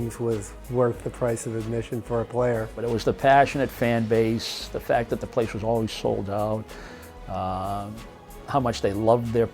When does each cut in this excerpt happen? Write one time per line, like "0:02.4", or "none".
0:02.8